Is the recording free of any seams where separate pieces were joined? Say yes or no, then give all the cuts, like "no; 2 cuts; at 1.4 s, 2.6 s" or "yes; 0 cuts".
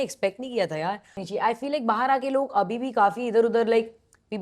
no; 1 cut; at 1.2 s